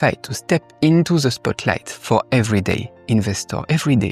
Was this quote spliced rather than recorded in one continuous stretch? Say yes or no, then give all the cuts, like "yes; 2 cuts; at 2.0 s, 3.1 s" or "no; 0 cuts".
no; 0 cuts